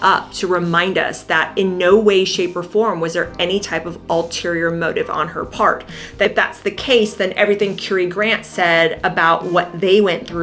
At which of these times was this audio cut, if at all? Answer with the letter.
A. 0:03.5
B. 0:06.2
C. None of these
B